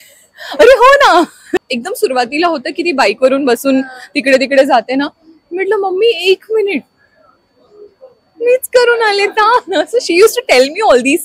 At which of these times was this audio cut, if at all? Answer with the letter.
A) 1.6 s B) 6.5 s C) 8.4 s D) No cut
A